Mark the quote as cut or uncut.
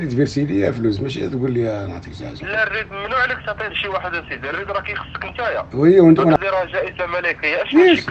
cut